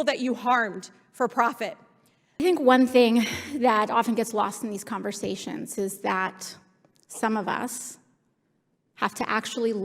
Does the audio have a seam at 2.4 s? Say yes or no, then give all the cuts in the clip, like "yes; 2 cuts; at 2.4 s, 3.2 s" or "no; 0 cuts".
yes; 1 cut; at 2.4 s